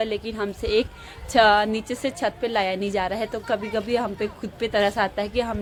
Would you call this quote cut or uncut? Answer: uncut